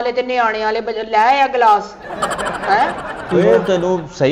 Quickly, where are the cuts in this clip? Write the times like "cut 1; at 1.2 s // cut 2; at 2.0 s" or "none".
none